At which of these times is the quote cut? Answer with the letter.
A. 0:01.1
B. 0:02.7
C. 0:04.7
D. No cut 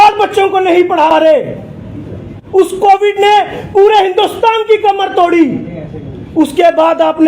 A